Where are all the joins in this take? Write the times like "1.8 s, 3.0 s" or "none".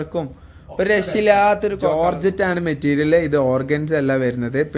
1.9 s